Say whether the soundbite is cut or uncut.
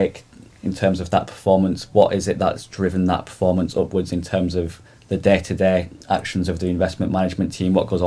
uncut